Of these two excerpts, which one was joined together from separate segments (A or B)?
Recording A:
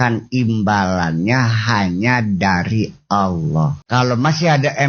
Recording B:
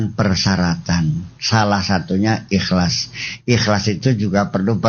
A